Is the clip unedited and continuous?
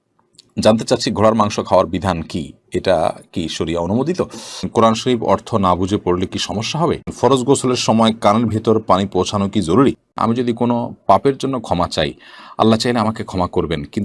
no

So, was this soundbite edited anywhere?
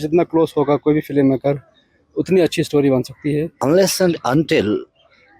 yes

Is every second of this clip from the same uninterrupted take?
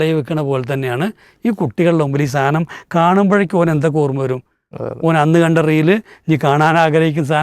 yes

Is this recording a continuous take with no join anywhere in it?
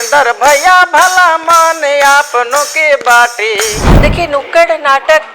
no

